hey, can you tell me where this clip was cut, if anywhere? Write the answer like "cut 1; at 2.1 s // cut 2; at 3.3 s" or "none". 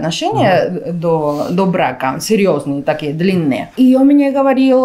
cut 1; at 3.7 s